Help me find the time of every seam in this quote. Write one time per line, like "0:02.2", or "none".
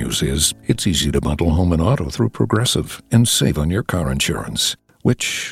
none